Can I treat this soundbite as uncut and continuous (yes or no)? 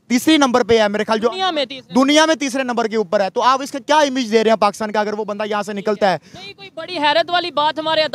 yes